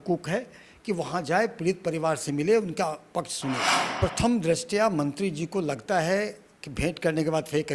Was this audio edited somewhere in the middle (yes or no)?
yes